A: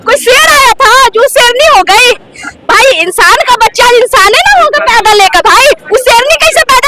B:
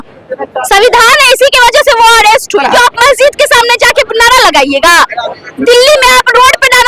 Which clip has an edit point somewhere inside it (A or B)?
B